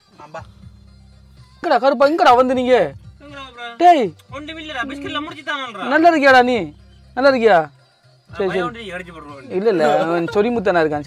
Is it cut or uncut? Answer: cut